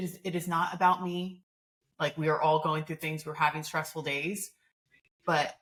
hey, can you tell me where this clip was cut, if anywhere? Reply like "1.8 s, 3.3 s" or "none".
none